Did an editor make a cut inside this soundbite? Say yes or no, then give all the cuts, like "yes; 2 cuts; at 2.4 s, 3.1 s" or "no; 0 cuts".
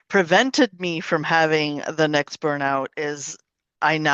no; 0 cuts